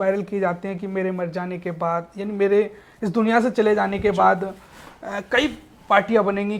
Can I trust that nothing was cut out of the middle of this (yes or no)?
yes